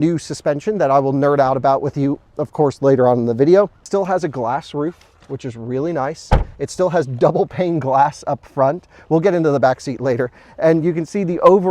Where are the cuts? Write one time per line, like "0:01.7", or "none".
0:03.8